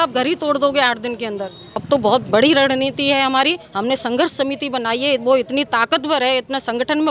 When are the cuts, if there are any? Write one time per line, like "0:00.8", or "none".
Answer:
none